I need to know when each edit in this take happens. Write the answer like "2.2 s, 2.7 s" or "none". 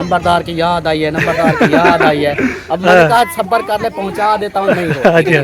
none